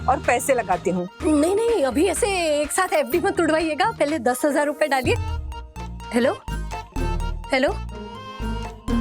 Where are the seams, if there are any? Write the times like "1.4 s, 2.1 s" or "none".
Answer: 1.1 s